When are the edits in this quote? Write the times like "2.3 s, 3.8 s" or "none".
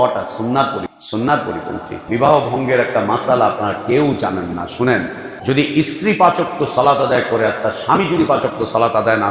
1.0 s, 2.1 s, 5.2 s